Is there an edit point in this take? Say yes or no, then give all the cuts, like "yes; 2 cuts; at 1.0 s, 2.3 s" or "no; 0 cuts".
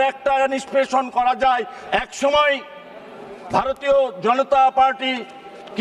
yes; 1 cut; at 1.8 s